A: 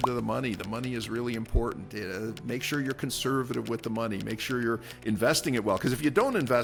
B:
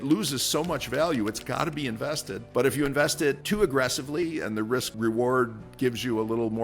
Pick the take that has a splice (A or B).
B